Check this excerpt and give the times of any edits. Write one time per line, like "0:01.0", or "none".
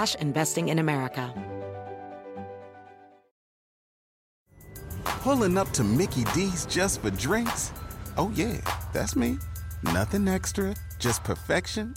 0:01.3